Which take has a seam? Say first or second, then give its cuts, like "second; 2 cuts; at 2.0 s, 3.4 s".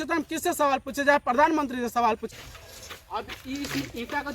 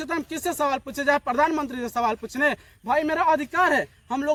first; 1 cut; at 2.3 s